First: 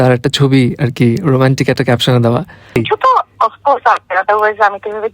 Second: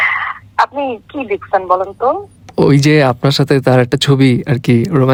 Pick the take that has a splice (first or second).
first